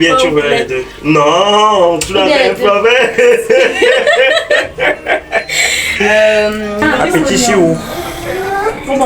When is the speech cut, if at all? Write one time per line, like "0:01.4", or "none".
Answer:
0:06.8